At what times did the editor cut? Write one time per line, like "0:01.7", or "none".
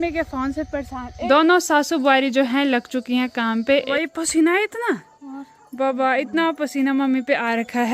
0:01.2
0:03.9